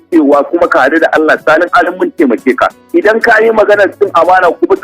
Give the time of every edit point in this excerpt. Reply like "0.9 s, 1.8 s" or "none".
2.8 s